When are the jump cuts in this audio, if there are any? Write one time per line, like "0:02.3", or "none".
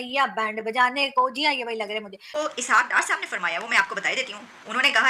0:02.2